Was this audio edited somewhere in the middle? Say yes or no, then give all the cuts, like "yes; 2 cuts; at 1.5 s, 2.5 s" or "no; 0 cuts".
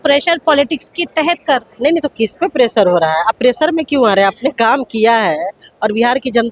no; 0 cuts